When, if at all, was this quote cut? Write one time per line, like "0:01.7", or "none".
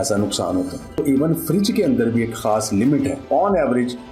0:01.0
0:03.2